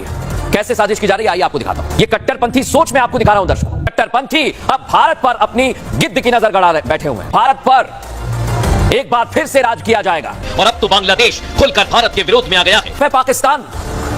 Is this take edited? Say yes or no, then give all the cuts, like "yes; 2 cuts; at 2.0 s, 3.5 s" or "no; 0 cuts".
yes; 5 cuts; at 1.9 s, 3.9 s, 7.2 s, 10.4 s, 13.0 s